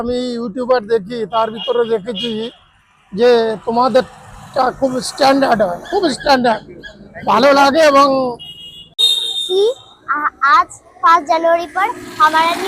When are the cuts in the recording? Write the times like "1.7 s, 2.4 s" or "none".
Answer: 8.9 s